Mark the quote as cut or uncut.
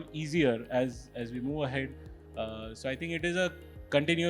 uncut